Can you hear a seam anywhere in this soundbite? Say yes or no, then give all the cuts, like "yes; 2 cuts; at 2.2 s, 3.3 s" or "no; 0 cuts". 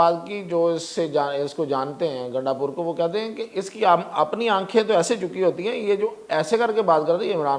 no; 0 cuts